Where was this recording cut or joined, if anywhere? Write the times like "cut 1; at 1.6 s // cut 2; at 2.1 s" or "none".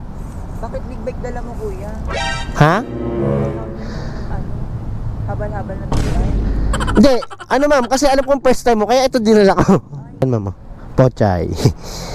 cut 1; at 10.2 s